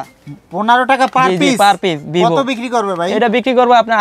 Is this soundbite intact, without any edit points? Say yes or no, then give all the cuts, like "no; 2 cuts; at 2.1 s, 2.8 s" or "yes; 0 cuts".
yes; 0 cuts